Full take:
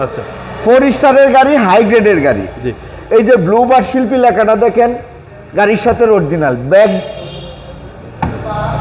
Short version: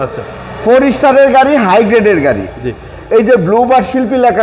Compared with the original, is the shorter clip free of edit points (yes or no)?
yes